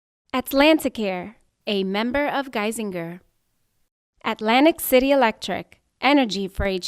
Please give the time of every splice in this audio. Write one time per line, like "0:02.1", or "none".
none